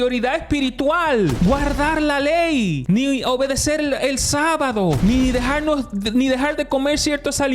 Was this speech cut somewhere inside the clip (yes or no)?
yes